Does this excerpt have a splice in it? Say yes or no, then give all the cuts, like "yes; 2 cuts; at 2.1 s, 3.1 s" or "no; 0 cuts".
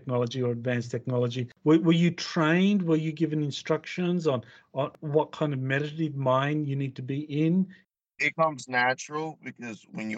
yes; 1 cut; at 7.8 s